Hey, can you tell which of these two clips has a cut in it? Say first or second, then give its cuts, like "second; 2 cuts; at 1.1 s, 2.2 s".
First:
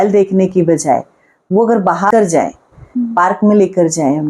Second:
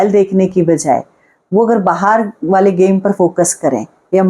first; 1 cut; at 2.1 s